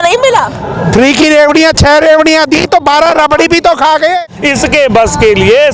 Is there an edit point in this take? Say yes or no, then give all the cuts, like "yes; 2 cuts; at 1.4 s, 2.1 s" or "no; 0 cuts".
yes; 1 cut; at 4.2 s